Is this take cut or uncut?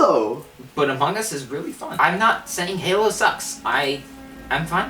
cut